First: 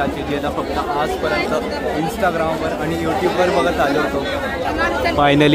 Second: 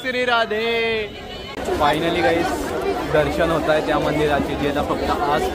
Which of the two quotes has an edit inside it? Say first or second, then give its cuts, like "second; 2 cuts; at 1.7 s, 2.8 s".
second; 1 cut; at 1.5 s